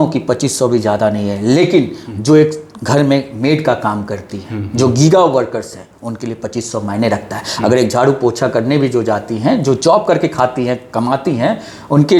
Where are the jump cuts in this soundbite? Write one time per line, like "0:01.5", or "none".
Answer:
none